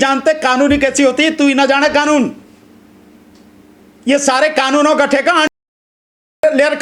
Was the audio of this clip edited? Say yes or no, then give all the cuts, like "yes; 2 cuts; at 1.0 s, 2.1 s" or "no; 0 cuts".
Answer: no; 0 cuts